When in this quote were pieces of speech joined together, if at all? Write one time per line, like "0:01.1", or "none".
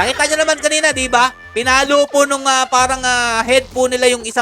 none

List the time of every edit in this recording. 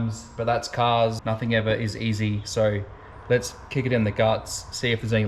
0:01.2

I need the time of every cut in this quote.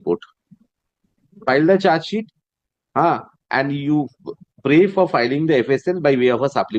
0:01.4

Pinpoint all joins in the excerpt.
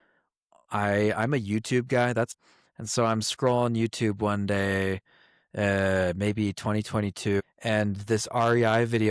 0:02.3
0:07.4

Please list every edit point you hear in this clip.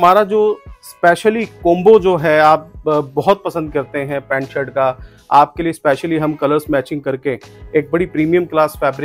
none

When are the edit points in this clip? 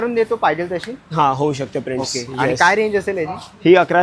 none

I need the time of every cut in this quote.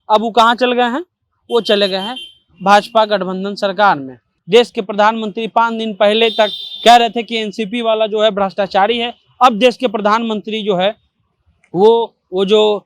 0:04.3

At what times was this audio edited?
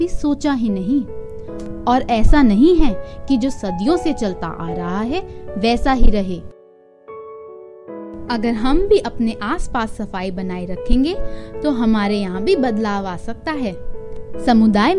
0:06.6
0:08.3

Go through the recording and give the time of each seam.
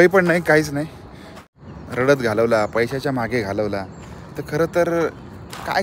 0:01.4

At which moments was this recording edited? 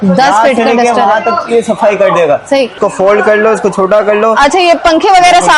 0:02.8

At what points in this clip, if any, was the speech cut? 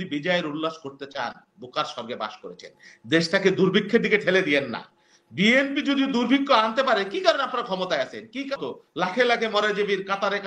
0:08.5

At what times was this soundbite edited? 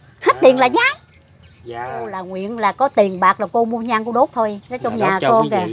0:02.3

